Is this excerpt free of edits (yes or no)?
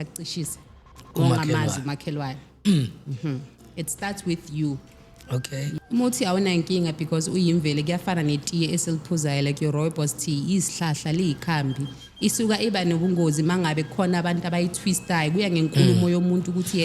no